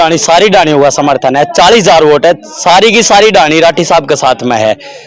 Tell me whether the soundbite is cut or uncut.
uncut